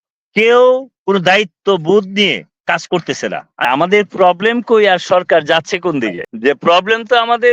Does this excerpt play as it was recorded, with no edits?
no; 2 cuts; at 3.7 s, 6.3 s

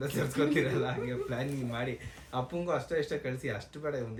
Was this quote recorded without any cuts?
yes; 0 cuts

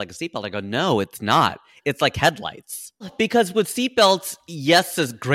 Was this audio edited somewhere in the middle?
yes; 1 cut; at 3.1 s

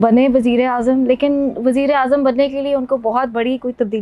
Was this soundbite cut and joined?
no; 0 cuts

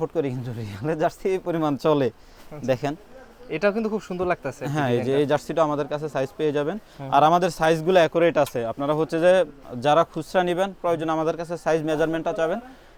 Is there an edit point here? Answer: no; 0 cuts

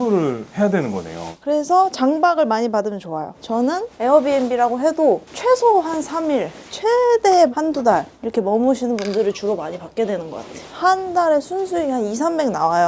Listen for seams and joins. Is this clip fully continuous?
no; 1 cut; at 10.6 s

